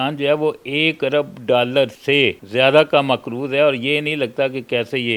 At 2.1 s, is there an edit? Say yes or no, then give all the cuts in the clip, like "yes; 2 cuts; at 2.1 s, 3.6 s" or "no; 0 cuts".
yes; 1 cut; at 2.1 s